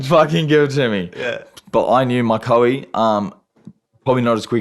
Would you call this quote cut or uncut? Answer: uncut